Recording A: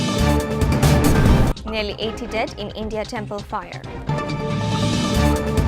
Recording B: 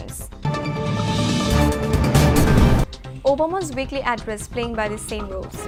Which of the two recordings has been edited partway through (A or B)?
A